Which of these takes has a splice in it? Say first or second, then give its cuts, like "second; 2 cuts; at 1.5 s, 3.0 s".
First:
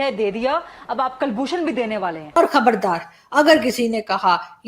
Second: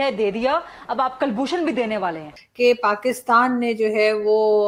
first; 1 cut; at 2.4 s